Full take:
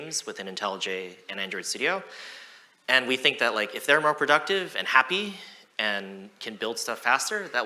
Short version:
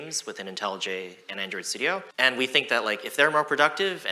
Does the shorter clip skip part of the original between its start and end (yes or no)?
yes